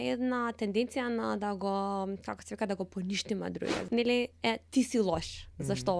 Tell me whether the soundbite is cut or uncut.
cut